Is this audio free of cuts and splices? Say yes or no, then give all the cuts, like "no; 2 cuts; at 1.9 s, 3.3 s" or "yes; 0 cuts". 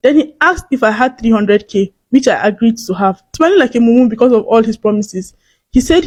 yes; 0 cuts